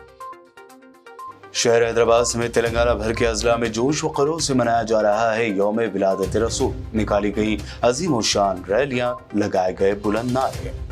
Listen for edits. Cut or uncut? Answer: cut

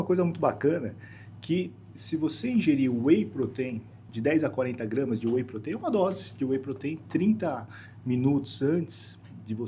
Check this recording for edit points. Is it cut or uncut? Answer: cut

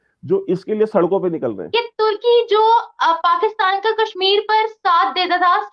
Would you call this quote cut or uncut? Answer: cut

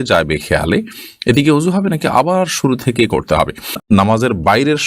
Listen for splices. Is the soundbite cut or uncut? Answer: cut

